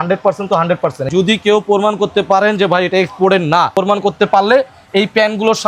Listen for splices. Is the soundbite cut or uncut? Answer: cut